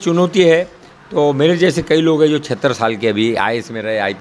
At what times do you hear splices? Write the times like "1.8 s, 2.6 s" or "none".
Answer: none

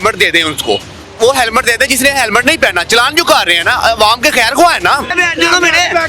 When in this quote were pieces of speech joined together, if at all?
1.0 s, 5.1 s

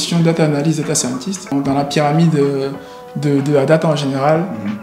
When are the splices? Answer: 1.5 s

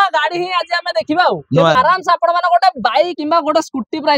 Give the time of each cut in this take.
1.7 s, 3.2 s

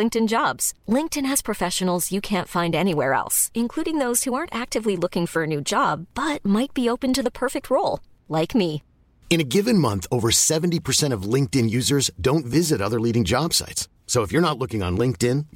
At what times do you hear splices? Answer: none

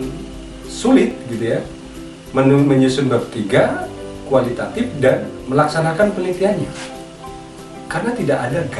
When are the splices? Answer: none

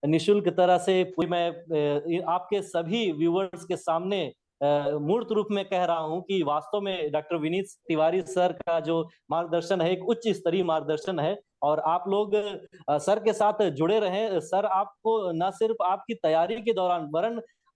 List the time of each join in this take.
1.2 s

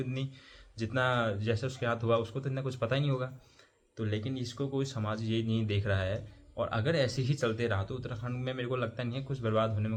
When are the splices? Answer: none

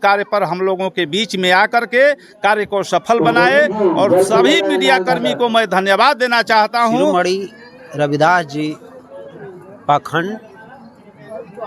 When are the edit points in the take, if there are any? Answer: 7.1 s

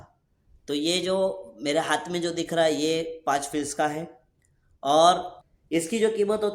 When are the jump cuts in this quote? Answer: 5.4 s

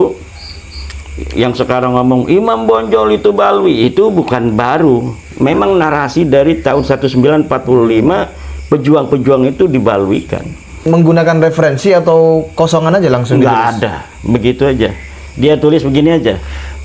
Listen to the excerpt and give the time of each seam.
10.8 s

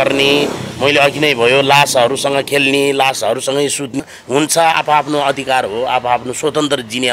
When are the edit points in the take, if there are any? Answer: 3.9 s

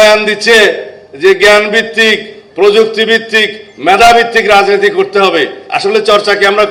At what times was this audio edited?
none

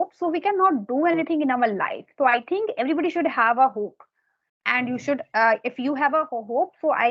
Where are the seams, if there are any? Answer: none

